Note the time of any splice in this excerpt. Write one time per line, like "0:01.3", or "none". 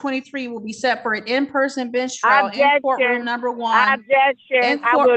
none